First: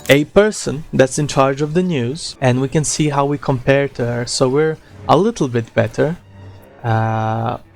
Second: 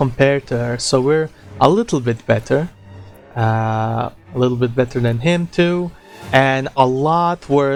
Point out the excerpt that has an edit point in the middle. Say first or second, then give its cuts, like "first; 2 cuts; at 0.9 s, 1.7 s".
first; 1 cut; at 2.2 s